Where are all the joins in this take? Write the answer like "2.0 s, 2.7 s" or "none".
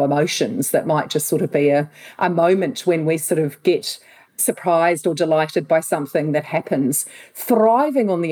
4.4 s